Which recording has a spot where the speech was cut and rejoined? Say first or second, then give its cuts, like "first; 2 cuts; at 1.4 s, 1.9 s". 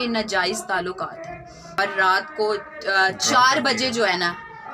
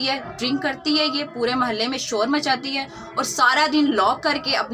first; 1 cut; at 1.8 s